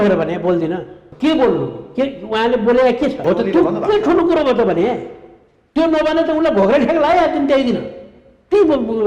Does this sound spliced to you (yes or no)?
yes